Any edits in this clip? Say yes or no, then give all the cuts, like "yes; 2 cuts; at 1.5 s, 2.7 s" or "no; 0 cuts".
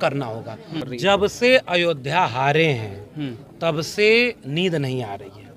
yes; 1 cut; at 0.9 s